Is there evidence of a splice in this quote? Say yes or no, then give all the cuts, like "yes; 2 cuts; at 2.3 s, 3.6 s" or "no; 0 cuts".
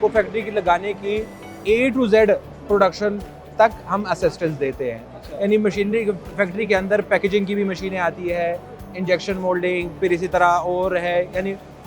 no; 0 cuts